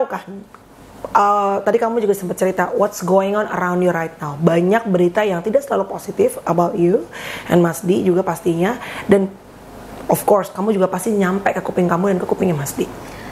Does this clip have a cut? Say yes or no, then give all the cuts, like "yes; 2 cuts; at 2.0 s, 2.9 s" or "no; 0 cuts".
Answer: no; 0 cuts